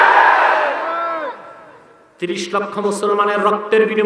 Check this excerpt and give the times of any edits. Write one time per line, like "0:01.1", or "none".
0:01.9